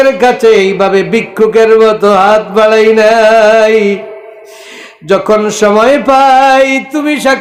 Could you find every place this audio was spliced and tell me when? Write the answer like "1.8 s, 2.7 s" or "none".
none